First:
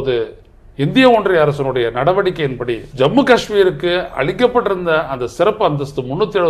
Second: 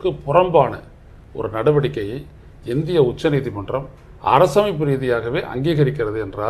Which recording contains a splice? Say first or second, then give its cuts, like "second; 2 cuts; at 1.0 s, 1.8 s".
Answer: first; 1 cut; at 2.9 s